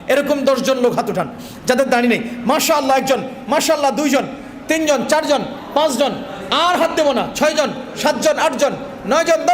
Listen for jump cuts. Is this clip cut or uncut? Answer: uncut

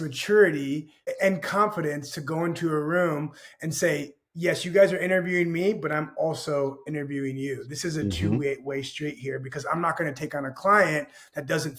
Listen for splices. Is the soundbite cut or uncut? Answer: cut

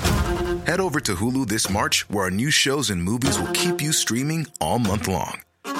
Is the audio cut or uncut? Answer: uncut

